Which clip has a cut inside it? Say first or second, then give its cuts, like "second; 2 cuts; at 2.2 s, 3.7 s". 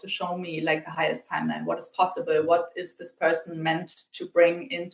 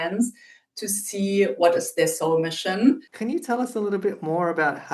second; 1 cut; at 3.1 s